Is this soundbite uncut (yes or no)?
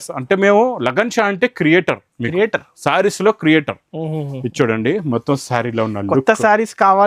yes